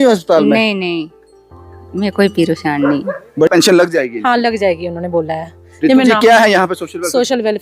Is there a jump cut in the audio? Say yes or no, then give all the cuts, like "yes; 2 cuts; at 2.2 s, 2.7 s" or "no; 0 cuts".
yes; 1 cut; at 3.5 s